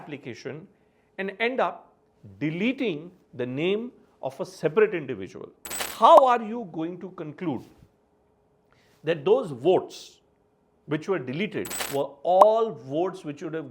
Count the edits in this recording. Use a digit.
2